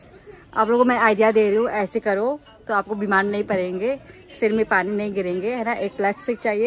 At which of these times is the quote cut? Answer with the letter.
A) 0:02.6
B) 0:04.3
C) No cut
C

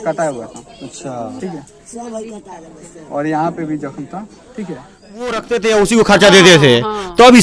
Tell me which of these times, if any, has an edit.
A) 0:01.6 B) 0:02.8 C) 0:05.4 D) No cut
C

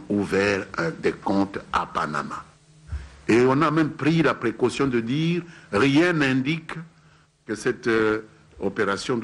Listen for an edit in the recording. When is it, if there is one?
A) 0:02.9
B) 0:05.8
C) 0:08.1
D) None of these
B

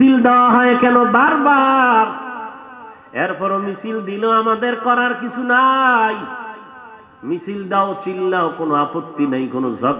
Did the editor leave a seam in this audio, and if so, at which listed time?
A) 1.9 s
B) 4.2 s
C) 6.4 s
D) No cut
D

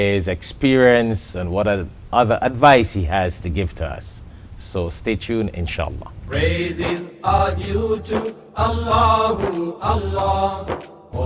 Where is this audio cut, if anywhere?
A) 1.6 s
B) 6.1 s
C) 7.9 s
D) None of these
B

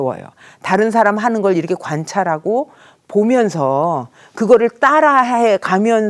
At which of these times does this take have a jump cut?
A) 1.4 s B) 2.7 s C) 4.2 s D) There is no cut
D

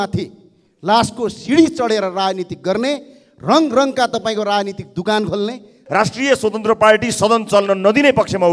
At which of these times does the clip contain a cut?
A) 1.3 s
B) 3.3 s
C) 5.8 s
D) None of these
C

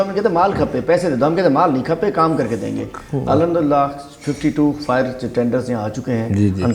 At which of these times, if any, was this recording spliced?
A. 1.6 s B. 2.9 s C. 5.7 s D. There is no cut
D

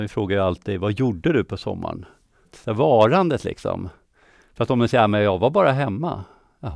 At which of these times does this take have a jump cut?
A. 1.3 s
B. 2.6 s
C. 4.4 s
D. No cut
B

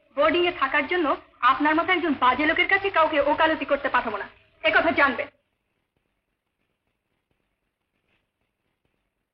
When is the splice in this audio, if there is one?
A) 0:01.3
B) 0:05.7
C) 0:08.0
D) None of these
D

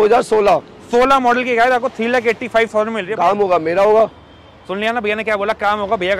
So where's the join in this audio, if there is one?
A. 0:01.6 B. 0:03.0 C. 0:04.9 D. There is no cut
B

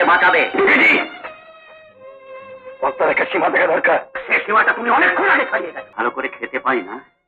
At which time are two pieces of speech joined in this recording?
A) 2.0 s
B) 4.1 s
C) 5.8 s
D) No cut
C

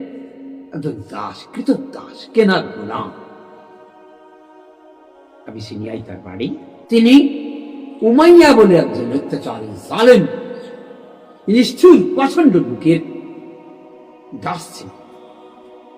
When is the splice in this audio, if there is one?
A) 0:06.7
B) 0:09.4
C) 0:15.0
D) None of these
A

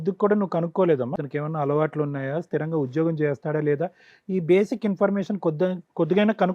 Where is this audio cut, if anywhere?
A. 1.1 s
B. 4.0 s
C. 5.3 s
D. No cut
A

